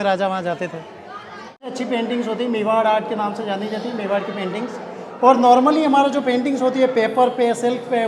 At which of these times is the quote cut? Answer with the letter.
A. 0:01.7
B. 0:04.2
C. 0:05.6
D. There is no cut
A